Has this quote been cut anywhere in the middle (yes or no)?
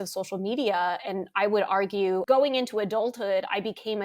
yes